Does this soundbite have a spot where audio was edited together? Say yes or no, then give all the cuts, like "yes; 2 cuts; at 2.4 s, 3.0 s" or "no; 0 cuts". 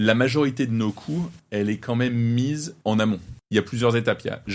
yes; 3 cuts; at 1.4 s, 2.7 s, 3.3 s